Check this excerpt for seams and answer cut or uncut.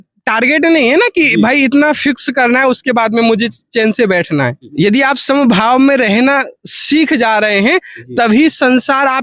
cut